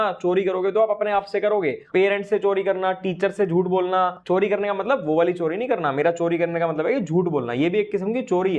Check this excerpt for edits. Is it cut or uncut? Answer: uncut